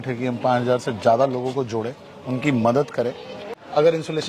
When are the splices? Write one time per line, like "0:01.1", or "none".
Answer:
0:03.2